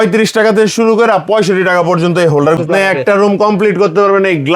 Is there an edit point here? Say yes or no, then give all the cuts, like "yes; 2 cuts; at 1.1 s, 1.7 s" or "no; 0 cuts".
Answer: yes; 1 cut; at 2.6 s